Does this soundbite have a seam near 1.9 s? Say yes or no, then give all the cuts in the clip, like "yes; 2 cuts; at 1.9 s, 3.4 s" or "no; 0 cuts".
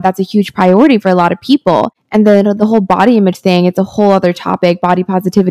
no; 0 cuts